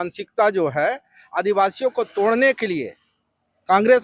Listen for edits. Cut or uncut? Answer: uncut